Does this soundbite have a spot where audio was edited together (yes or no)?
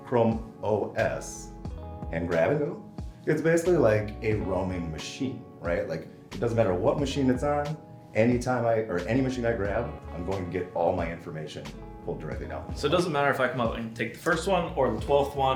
no